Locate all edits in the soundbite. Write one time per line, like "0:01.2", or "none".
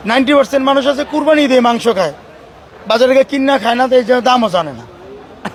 none